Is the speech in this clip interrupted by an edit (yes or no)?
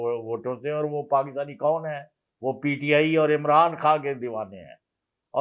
no